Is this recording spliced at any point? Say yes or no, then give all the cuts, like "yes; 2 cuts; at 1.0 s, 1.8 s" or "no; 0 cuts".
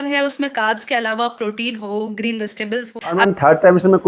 yes; 1 cut; at 3.2 s